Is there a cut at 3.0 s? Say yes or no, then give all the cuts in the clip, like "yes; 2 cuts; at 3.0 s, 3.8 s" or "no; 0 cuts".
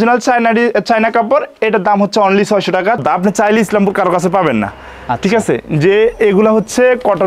yes; 1 cut; at 3.0 s